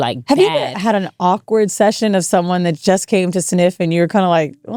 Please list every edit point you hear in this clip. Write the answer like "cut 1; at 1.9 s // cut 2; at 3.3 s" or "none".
none